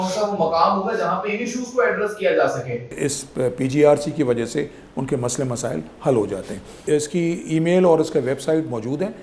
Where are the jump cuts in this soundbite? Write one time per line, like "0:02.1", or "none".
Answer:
0:03.0
0:06.8